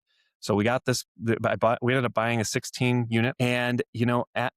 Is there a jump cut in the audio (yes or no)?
yes